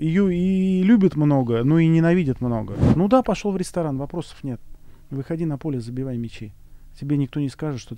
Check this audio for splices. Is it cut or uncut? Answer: cut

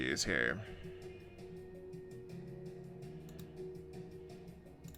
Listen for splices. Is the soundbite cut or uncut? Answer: uncut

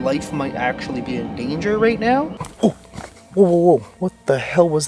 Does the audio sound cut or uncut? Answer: cut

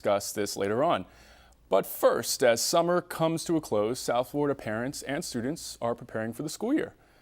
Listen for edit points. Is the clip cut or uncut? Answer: cut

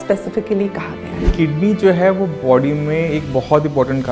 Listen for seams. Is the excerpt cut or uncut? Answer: cut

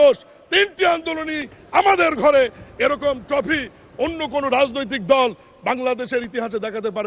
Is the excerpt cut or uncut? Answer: uncut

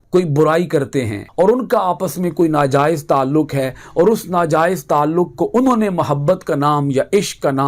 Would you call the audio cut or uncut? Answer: cut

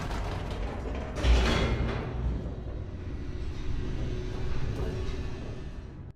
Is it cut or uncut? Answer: uncut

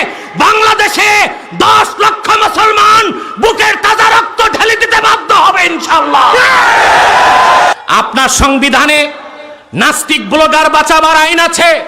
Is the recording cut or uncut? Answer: cut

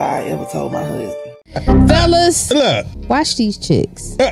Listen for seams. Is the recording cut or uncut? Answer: cut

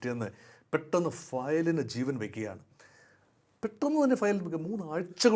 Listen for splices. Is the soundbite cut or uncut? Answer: uncut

